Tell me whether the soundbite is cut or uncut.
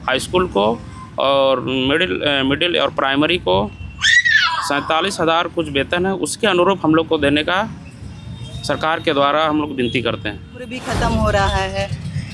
cut